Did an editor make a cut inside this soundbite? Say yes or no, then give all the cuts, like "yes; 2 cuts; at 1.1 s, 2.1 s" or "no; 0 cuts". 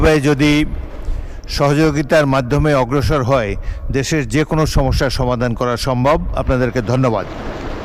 no; 0 cuts